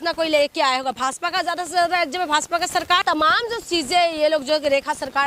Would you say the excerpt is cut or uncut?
cut